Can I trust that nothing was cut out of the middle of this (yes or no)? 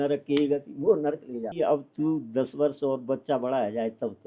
no